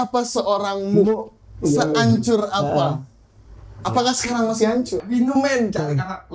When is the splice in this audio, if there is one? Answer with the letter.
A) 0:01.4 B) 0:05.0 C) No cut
B